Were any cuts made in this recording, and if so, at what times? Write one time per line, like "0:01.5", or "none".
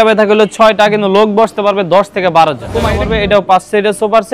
0:03.0